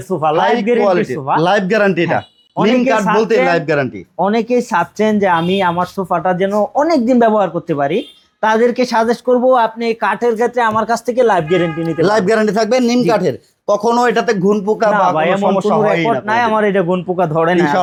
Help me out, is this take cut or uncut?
uncut